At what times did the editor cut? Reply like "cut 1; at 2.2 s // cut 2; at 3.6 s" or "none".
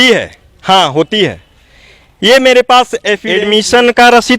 cut 1; at 3.2 s